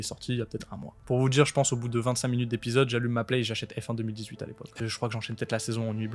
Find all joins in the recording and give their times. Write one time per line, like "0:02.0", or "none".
0:01.0
0:04.7